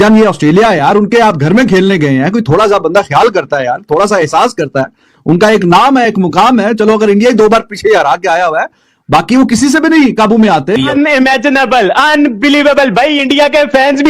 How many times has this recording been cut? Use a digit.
1